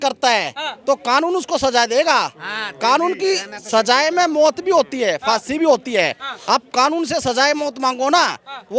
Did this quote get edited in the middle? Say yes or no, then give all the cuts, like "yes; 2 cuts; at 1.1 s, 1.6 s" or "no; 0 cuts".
no; 0 cuts